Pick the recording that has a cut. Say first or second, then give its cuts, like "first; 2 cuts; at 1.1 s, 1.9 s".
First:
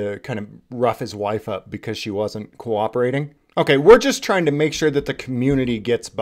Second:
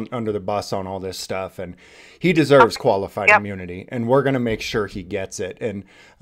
first; 1 cut; at 3.4 s